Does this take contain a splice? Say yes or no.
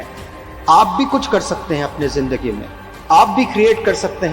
no